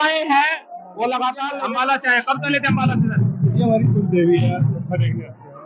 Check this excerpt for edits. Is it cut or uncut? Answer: cut